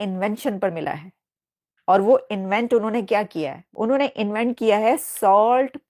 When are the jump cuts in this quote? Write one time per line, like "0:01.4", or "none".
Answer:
0:03.6